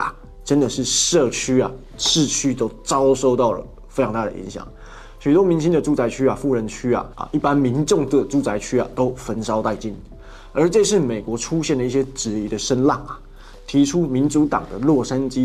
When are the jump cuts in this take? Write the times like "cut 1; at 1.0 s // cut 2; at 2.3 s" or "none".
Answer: none